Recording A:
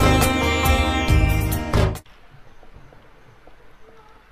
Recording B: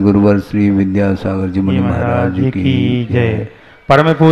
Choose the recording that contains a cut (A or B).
A